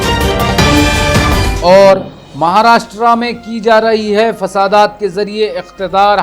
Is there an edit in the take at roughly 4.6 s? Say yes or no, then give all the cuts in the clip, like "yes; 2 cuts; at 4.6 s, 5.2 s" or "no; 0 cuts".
no; 1 cut; at 1.5 s